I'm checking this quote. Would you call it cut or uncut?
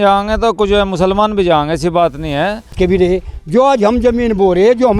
cut